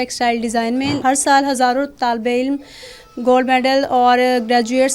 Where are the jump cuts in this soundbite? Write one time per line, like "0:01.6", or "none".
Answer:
0:01.0